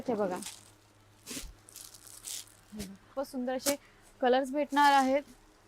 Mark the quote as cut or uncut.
cut